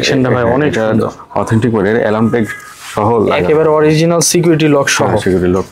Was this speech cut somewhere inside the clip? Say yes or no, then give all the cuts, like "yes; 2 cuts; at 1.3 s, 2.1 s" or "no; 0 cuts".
no; 0 cuts